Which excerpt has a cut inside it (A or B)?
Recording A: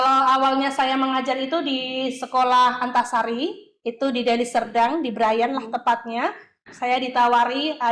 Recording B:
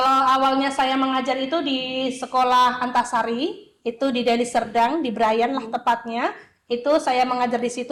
A